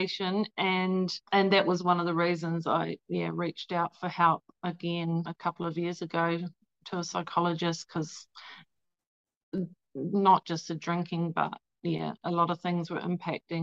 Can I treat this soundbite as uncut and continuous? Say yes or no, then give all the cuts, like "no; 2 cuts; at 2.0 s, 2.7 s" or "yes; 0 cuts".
yes; 0 cuts